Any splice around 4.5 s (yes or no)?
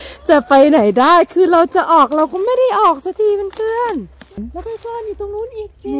yes